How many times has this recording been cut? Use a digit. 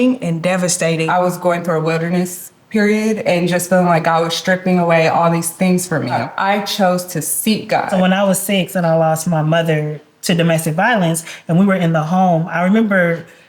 3